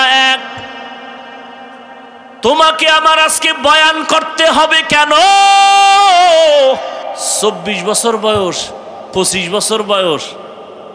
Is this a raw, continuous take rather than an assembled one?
no; 1 cut; at 7.3 s

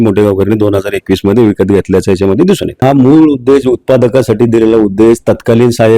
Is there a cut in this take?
yes; 1 cut; at 2.8 s

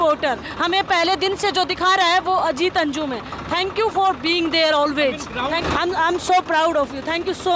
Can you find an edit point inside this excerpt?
yes; 1 cut; at 5.6 s

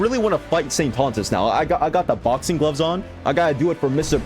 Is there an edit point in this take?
yes; 1 cut; at 3.1 s

